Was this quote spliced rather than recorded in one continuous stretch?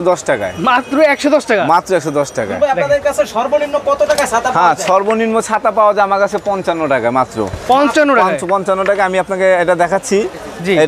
no; 0 cuts

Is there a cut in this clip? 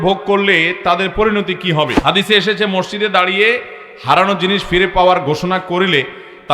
yes; 1 cut; at 2.0 s

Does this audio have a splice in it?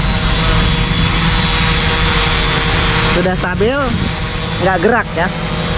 no; 0 cuts

